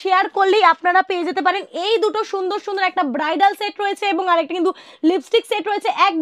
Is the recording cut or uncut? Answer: uncut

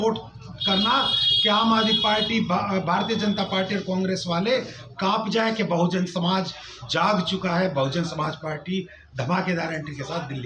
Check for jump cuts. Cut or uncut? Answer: uncut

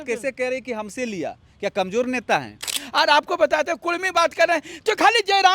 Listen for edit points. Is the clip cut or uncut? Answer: cut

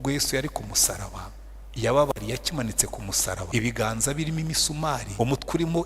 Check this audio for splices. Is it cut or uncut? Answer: cut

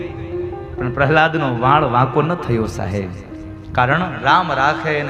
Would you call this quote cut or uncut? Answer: uncut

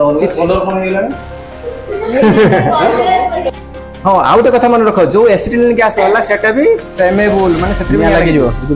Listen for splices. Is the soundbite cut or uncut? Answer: cut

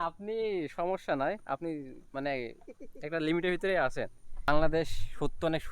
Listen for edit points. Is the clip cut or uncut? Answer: cut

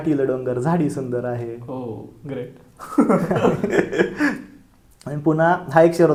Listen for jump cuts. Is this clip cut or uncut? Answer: uncut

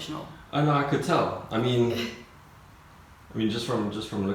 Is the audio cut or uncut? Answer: uncut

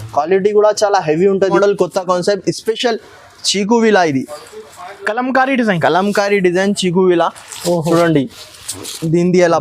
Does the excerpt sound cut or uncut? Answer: cut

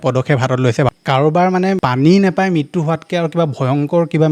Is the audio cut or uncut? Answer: cut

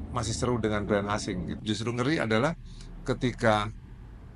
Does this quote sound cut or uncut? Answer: cut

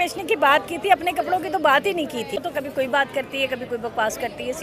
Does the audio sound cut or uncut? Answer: cut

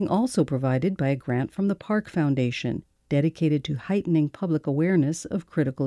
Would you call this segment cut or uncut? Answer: uncut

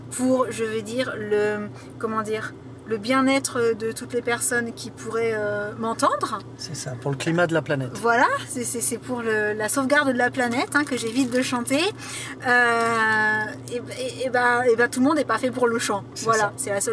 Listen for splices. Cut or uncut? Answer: uncut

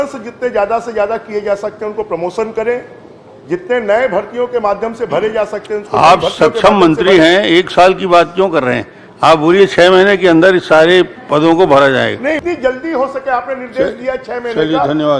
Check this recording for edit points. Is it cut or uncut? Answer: cut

